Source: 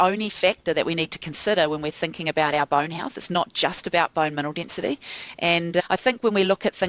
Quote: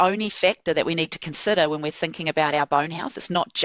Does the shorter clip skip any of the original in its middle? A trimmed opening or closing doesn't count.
no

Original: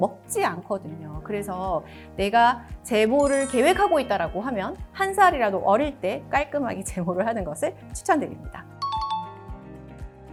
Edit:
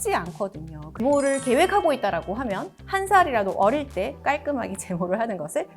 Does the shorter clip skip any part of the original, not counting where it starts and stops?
yes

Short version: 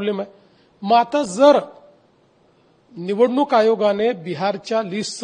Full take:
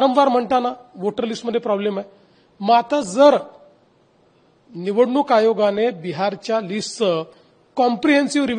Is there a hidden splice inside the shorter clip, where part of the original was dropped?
no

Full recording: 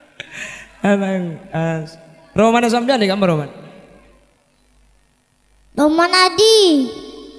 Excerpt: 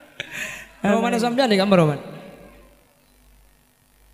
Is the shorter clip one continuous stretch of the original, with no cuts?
no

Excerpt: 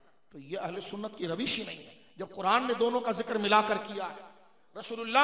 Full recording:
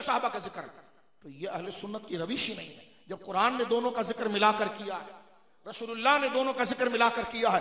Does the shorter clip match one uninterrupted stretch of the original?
yes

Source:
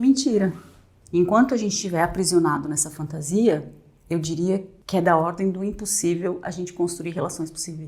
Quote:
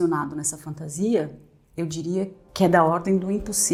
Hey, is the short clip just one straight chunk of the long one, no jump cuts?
yes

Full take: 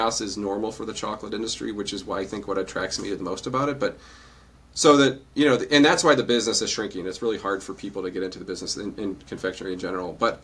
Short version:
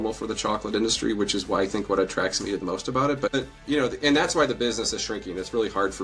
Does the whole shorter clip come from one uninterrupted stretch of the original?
no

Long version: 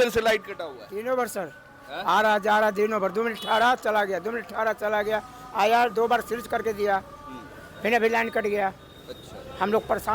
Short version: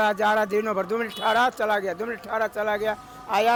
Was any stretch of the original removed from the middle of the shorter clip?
no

